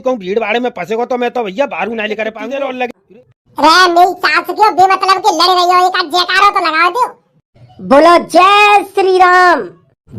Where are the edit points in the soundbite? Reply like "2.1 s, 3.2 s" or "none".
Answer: 3.0 s